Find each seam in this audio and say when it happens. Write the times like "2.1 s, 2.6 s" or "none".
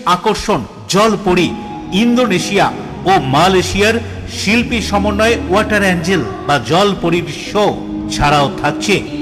none